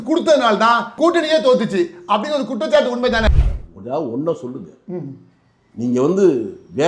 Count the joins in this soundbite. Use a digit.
1